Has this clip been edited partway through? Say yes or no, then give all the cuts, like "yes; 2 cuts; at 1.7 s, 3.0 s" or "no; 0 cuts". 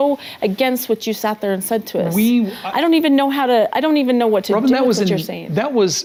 no; 0 cuts